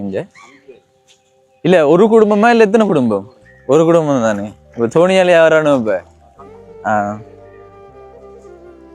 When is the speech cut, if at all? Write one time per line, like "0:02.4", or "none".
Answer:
0:07.2